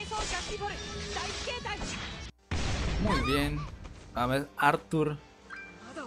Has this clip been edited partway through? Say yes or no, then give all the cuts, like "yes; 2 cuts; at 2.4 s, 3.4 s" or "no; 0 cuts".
no; 0 cuts